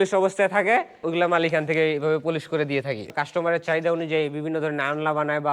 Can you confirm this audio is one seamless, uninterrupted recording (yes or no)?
no